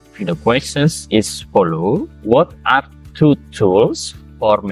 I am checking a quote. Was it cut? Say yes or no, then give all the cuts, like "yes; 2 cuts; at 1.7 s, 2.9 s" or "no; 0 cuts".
yes; 1 cut; at 2.1 s